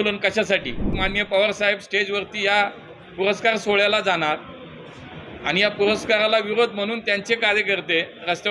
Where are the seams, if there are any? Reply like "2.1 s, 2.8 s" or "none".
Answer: 0.9 s